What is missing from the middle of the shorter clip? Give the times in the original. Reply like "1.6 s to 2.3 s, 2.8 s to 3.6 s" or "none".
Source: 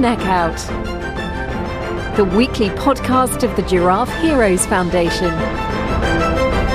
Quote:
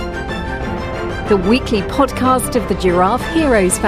none